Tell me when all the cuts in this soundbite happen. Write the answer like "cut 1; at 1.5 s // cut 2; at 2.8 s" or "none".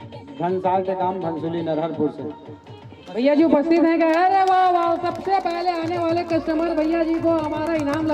none